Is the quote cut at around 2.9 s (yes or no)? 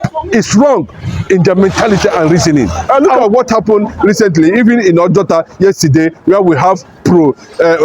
yes